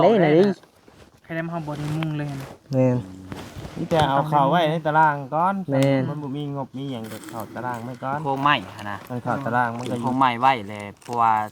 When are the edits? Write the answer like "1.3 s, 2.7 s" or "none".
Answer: 8.2 s, 9.0 s, 10.0 s